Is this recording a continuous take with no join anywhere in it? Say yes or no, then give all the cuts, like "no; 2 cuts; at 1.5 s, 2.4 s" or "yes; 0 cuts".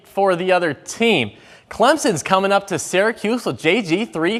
yes; 0 cuts